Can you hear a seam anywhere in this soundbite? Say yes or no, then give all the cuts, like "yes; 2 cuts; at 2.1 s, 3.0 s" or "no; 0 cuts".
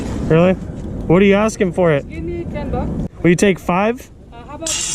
yes; 1 cut; at 3.0 s